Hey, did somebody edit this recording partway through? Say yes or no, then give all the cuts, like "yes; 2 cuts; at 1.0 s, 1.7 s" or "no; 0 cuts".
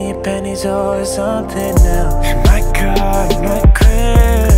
no; 0 cuts